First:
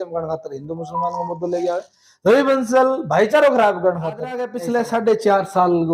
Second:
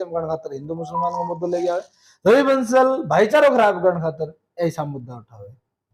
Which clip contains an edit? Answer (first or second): first